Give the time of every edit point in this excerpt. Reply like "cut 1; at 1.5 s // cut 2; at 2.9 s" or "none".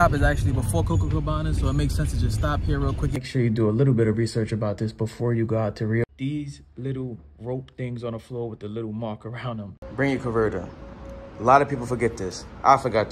cut 1; at 3.3 s // cut 2; at 6.0 s // cut 3; at 9.8 s